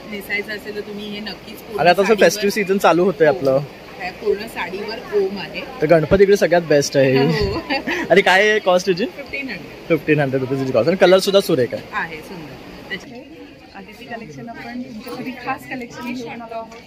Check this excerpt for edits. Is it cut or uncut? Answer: cut